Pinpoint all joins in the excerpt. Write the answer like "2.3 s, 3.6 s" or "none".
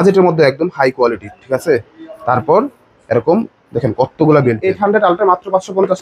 4.6 s

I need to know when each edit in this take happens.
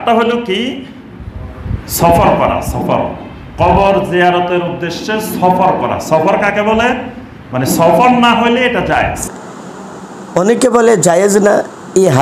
9.2 s

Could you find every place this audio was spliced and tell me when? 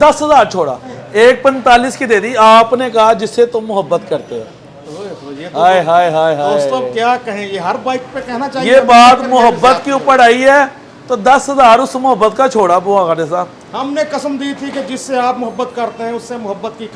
1.0 s

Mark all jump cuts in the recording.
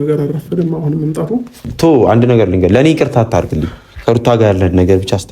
1.6 s

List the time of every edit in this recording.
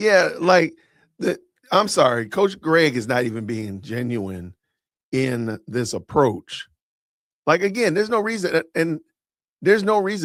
none

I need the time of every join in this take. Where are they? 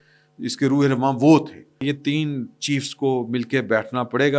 1.9 s

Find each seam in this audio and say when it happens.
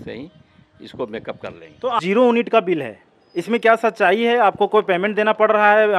2.0 s

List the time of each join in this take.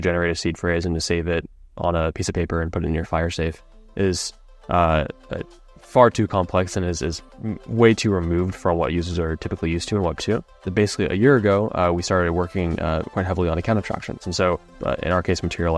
10.6 s, 14.4 s

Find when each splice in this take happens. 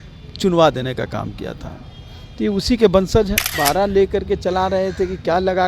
3.5 s

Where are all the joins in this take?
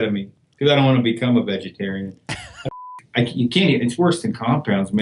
2.5 s

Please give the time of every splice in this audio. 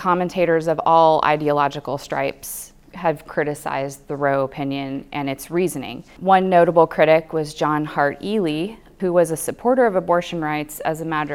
6.1 s, 8.9 s

